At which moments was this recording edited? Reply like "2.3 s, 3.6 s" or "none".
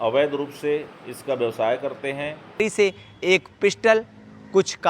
2.6 s